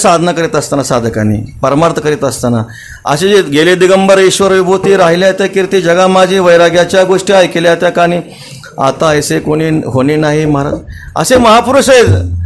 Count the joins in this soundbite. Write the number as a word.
zero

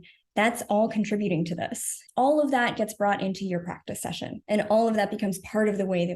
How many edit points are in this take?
one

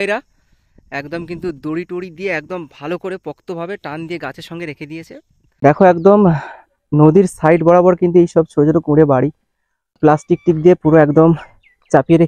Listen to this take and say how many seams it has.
two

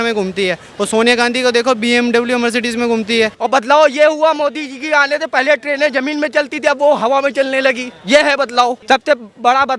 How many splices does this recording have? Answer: two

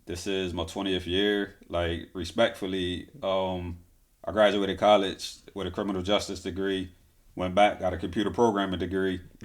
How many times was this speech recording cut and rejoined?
zero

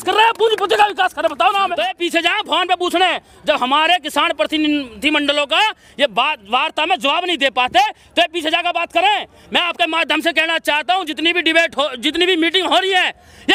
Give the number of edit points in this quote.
one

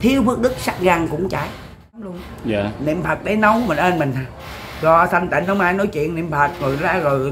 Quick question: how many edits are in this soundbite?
one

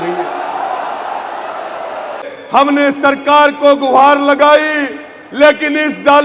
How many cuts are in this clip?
one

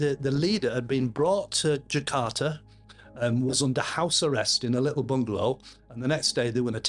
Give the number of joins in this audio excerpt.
zero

